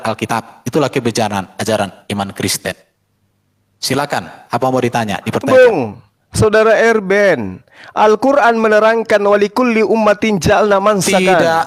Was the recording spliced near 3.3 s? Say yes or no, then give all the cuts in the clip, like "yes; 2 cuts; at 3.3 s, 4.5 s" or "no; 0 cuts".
no; 0 cuts